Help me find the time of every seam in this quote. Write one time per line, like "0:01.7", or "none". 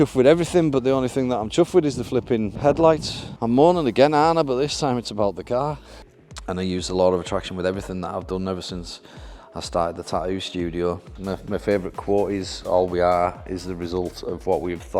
0:02.5
0:05.9
0:11.1